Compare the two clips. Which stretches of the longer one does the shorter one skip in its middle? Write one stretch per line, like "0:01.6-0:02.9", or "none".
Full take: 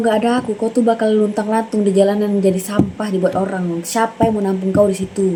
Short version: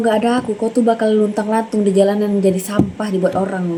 none